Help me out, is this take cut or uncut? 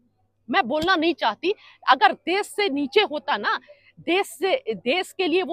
uncut